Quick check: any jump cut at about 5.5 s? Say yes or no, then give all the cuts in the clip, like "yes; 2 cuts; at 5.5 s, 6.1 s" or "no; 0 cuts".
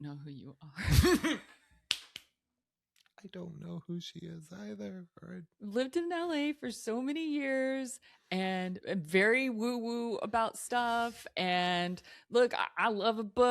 yes; 1 cut; at 5.5 s